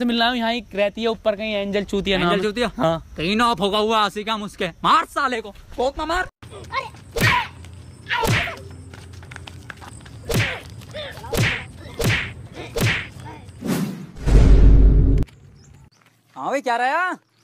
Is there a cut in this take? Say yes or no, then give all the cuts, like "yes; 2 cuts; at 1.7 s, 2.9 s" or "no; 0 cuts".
yes; 1 cut; at 14.3 s